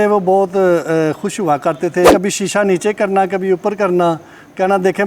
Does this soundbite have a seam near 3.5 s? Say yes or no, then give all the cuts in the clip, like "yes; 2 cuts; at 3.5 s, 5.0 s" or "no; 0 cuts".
no; 1 cut; at 2.1 s